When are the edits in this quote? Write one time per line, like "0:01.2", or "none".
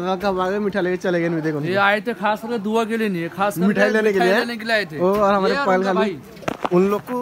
none